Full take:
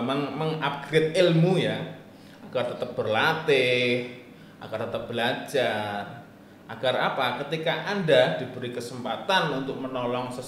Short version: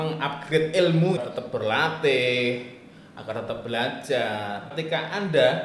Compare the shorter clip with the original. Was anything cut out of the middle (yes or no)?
yes